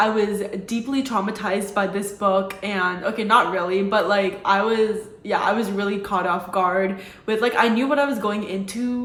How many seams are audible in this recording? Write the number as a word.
zero